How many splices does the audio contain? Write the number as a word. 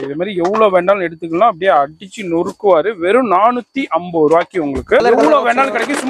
one